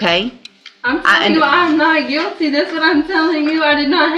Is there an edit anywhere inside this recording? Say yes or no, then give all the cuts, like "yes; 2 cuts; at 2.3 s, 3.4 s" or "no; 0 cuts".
no; 0 cuts